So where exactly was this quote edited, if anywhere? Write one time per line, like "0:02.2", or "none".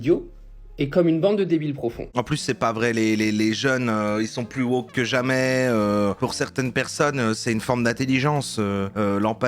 0:02.2